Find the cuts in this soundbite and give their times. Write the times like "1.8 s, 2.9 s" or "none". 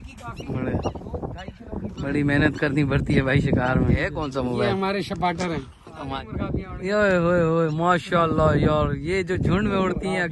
4.2 s, 5.9 s